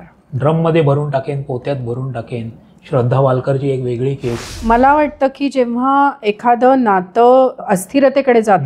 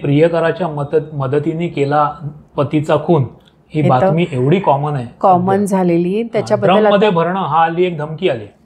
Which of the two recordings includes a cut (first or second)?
first